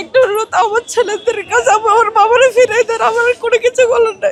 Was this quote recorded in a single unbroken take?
yes; 0 cuts

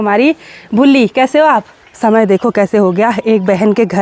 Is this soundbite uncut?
no; 1 cut; at 1.8 s

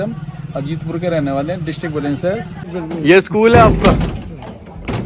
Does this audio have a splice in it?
yes; 1 cut; at 2.8 s

